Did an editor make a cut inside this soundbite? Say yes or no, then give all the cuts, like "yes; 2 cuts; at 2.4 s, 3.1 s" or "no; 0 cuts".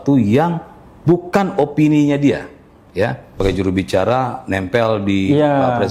yes; 1 cut; at 3.4 s